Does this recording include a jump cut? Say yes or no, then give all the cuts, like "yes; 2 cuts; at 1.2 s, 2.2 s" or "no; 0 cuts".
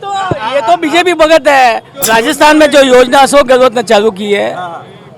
yes; 1 cut; at 1.9 s